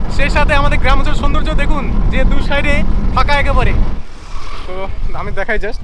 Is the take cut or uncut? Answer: cut